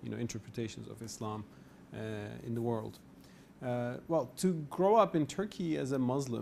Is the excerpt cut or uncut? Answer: cut